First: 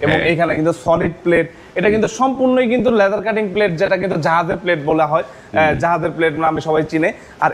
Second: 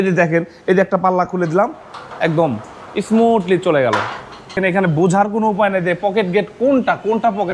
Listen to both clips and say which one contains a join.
second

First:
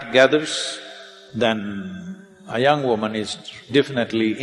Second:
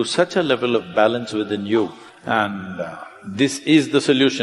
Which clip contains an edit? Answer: second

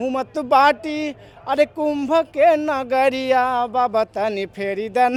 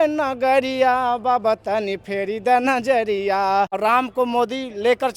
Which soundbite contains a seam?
second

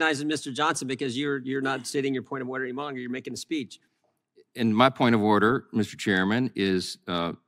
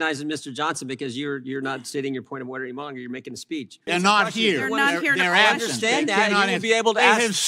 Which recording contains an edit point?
second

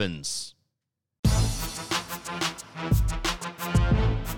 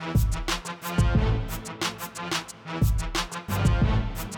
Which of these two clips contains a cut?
first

